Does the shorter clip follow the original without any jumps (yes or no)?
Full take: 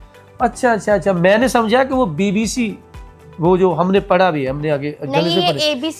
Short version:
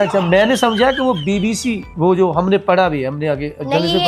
no